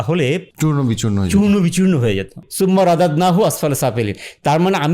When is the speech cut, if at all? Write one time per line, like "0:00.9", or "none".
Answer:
0:02.4